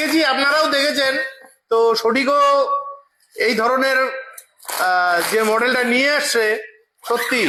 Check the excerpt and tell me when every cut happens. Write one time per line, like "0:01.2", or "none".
none

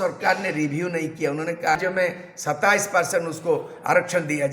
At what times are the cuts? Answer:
0:01.8

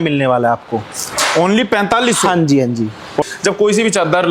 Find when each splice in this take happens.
0:03.2

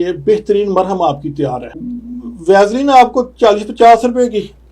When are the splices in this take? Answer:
0:01.7

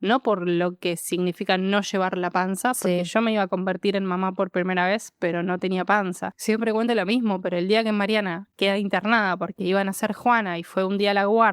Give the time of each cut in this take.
0:06.4

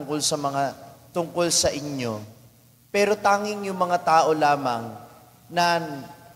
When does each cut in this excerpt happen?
none

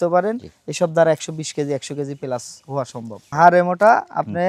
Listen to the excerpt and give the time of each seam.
0:03.2

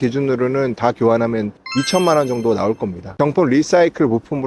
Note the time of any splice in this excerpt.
0:01.6
0:03.1

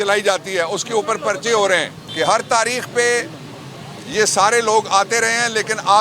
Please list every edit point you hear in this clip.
0:02.0

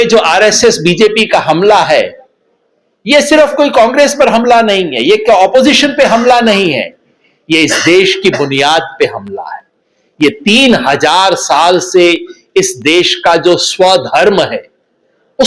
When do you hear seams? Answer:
none

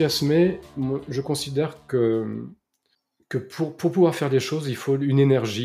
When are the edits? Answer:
none

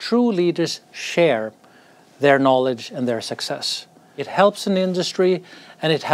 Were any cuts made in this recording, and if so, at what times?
0:04.2

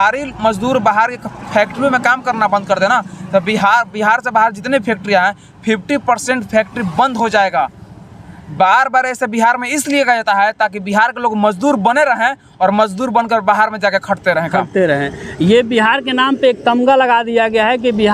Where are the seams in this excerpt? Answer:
none

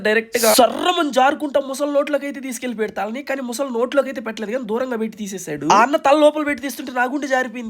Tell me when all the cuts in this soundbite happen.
none

